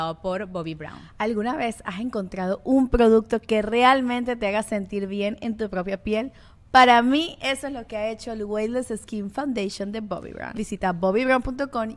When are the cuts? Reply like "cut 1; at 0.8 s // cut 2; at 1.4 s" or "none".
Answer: cut 1; at 10.4 s